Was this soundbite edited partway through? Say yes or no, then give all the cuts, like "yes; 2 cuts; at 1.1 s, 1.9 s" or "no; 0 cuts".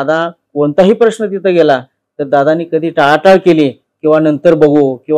no; 0 cuts